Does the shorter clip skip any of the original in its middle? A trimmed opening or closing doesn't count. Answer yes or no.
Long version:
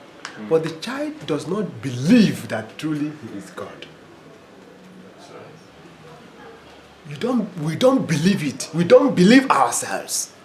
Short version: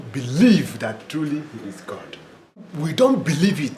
yes